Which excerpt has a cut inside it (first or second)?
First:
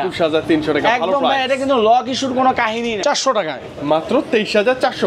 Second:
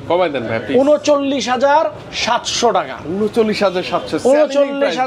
first